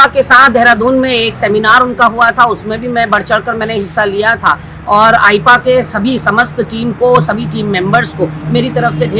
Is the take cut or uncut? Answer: uncut